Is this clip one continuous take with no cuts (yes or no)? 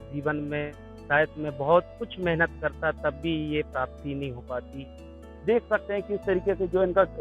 no